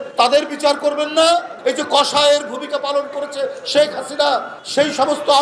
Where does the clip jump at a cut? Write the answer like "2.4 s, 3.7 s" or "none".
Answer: 1.6 s